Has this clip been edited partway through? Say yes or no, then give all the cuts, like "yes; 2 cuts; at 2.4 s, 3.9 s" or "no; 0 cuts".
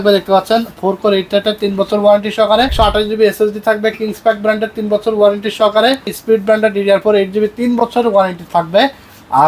yes; 2 cuts; at 2.7 s, 6.2 s